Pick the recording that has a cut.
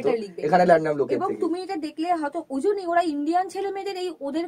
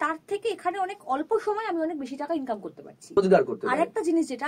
second; 1 cut; at 3.2 s

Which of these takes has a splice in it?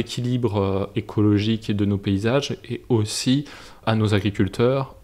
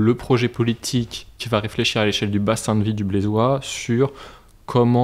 first; 1 cut; at 3.8 s

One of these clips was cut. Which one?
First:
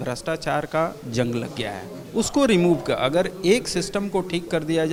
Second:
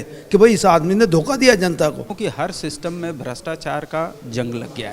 second; 1 cut; at 2.1 s

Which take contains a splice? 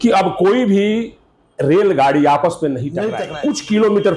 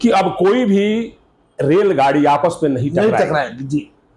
first; 1 cut; at 3.2 s

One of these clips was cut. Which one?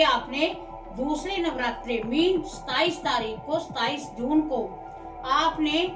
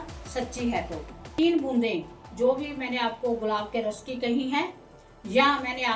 second; 1 cut; at 1.3 s

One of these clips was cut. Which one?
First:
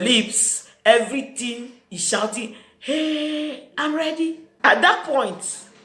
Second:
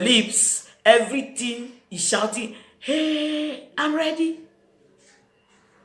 first; 1 cut; at 4.5 s

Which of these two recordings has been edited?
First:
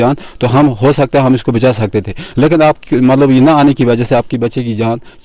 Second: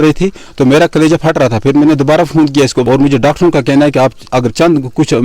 second; 1 cut; at 2.9 s

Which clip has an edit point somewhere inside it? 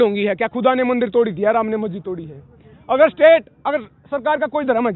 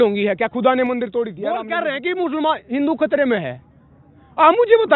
second; 1 cut; at 1.7 s

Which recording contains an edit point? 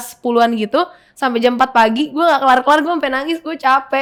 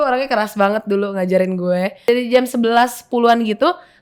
second; 1 cut; at 2.0 s

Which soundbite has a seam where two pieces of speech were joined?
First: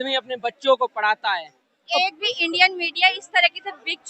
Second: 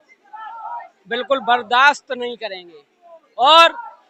first; 1 cut; at 1.9 s

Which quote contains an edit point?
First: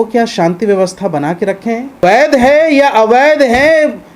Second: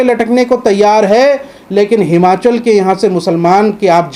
first; 1 cut; at 2.0 s

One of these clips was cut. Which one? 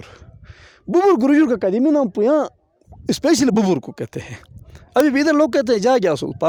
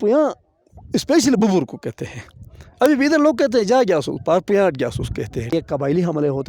second; 1 cut; at 5.5 s

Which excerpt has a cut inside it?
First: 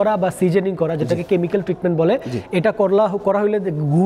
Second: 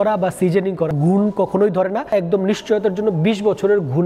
second; 2 cuts; at 0.9 s, 2.1 s

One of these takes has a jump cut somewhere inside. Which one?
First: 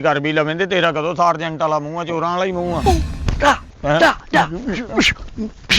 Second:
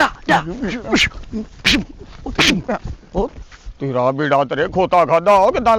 first; 1 cut; at 2.9 s

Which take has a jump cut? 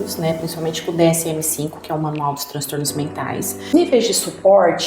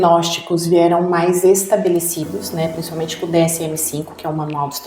first; 1 cut; at 3.7 s

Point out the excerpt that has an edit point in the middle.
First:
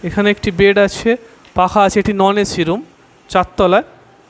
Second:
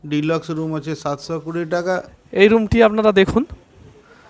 second; 1 cut; at 2.2 s

